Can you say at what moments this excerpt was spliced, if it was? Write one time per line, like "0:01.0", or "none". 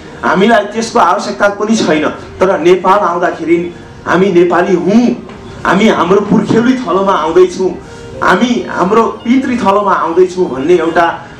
none